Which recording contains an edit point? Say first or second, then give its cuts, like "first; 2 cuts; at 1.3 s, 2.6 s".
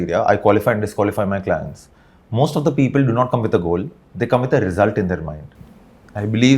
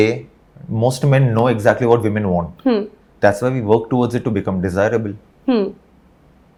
first; 1 cut; at 5.4 s